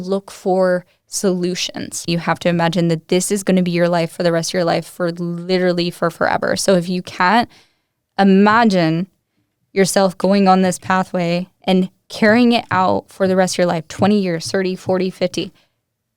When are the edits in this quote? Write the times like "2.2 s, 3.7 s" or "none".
2.1 s